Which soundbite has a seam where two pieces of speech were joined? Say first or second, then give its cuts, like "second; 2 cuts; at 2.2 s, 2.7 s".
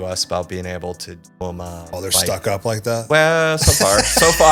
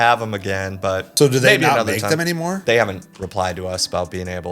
second; 2 cuts; at 1.1 s, 2.6 s